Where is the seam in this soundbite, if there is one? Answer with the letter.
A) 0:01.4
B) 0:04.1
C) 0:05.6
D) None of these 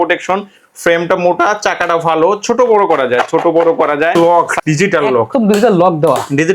B